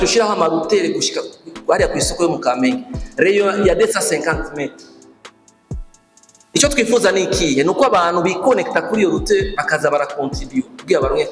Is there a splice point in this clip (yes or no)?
yes